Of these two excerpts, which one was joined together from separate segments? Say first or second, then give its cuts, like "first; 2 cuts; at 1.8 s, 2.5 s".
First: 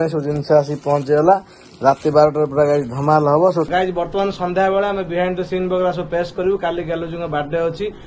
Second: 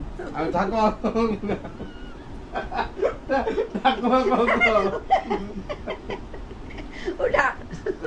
first; 1 cut; at 3.7 s